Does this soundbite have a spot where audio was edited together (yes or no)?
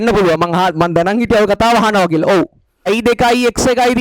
yes